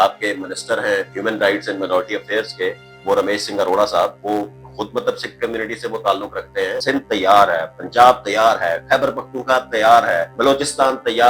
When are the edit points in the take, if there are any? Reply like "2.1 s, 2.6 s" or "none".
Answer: 1.1 s, 6.8 s, 10.3 s